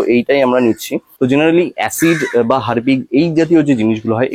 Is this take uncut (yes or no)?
no